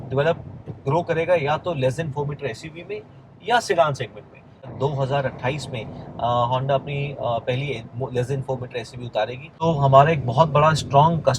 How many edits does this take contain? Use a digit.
2